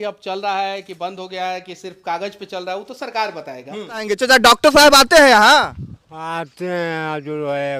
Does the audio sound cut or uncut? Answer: cut